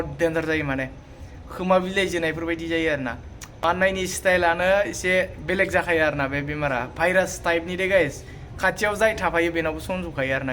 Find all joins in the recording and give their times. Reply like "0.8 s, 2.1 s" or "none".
3.4 s